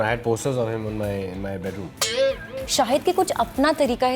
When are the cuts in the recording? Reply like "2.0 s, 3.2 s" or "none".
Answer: 1.9 s, 2.5 s